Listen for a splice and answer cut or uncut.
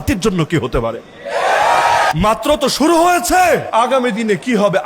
cut